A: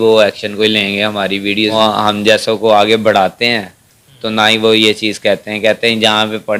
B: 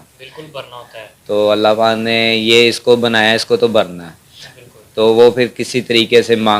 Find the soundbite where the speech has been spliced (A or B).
A